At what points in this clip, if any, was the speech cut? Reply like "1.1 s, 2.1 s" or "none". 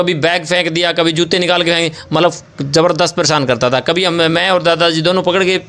none